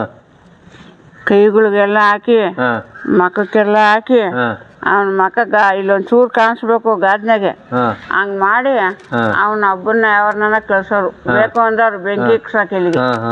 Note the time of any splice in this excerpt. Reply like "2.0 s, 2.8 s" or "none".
none